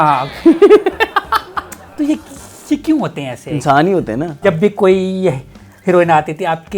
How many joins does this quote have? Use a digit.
2